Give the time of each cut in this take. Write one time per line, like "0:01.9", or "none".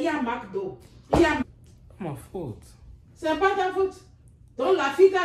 0:01.4